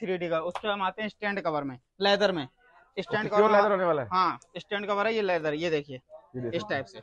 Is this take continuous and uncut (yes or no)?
yes